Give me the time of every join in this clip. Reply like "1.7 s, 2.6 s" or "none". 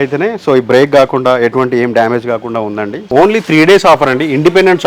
3.1 s